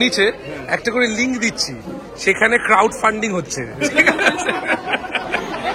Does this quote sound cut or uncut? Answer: uncut